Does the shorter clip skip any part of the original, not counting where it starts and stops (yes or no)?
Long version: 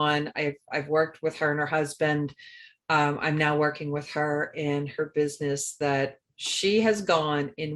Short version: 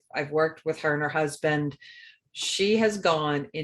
yes